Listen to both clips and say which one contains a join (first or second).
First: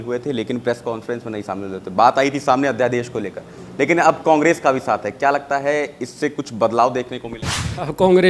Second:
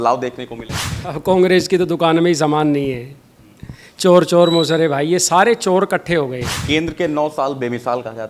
second